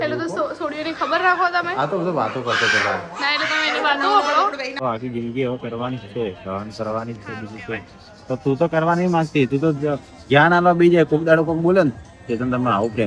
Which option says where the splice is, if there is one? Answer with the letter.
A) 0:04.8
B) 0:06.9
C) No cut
A